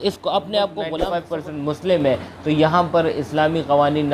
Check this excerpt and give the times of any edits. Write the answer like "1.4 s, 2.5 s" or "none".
1.2 s